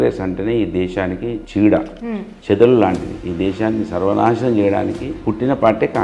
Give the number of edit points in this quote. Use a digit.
0